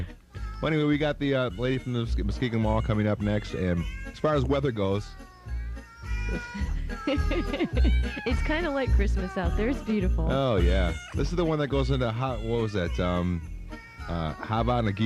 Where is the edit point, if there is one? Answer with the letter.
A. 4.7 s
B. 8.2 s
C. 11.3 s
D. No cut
B